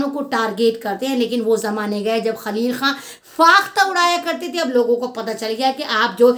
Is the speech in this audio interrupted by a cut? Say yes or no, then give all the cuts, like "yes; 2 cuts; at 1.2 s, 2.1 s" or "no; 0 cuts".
no; 0 cuts